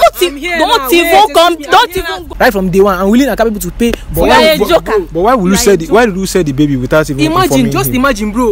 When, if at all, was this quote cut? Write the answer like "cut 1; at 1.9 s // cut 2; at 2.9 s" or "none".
cut 1; at 2.2 s